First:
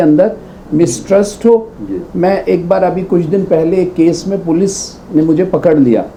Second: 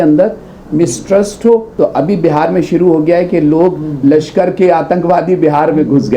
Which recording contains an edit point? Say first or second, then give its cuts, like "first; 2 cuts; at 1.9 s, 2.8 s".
second; 1 cut; at 1.7 s